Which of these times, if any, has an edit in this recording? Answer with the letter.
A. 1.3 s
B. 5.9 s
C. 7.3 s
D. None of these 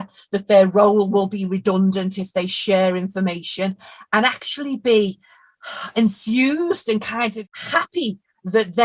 C